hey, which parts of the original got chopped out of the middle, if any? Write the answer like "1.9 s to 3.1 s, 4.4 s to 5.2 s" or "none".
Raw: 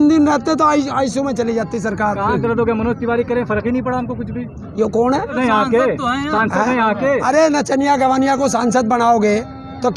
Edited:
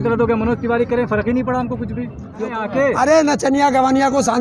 4.9 s to 6.8 s